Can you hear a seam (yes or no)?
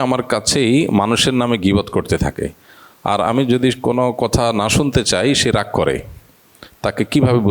no